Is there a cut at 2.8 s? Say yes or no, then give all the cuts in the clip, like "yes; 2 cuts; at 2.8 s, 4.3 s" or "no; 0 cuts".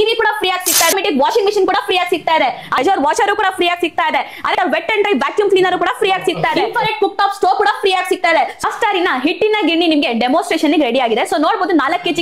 yes; 5 cuts; at 0.9 s, 2.8 s, 4.5 s, 6.6 s, 8.6 s